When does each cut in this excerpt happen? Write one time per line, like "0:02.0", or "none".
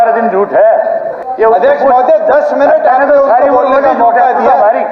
0:01.1